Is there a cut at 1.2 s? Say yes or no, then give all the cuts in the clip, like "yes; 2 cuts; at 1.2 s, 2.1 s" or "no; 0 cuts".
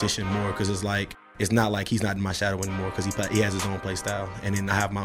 yes; 1 cut; at 1.2 s